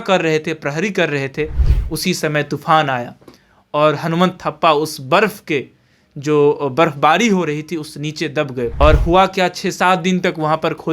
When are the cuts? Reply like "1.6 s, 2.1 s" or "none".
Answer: 8.7 s